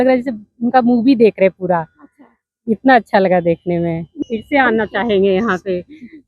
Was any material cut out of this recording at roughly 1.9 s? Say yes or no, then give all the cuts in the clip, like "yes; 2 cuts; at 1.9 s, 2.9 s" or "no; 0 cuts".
no; 1 cut; at 4.2 s